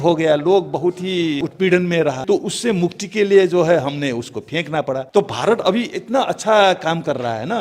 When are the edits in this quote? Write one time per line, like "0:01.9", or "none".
0:01.4
0:02.2
0:05.0